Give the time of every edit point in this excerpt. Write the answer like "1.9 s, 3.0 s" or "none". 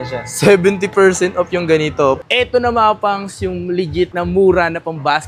2.2 s